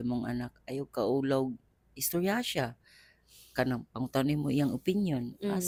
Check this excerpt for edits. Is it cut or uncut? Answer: uncut